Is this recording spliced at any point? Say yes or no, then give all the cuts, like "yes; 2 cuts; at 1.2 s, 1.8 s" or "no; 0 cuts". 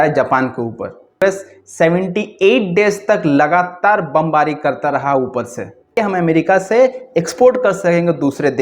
yes; 2 cuts; at 1.2 s, 5.9 s